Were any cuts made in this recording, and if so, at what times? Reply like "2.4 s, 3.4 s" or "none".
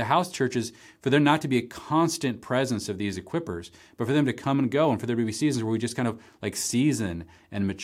none